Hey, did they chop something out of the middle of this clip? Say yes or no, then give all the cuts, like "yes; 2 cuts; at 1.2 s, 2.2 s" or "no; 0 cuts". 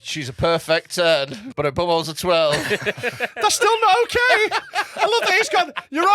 yes; 1 cut; at 1.4 s